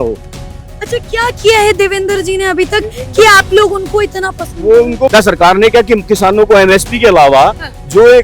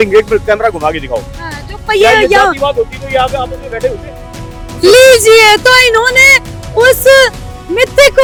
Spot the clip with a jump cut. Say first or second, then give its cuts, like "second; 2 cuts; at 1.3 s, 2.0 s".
first; 1 cut; at 5.1 s